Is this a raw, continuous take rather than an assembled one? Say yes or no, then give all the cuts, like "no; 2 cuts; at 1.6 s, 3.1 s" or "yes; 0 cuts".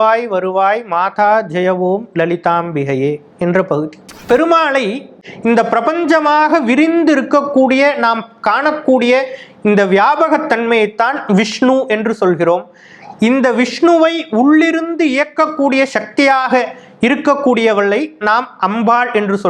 no; 2 cuts; at 4.1 s, 5.2 s